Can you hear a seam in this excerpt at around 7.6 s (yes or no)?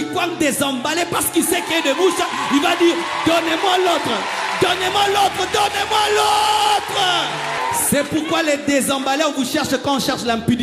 yes